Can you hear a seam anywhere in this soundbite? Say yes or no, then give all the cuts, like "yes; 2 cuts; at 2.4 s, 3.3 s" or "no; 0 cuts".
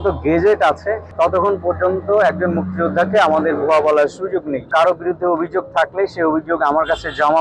yes; 2 cuts; at 1.0 s, 4.7 s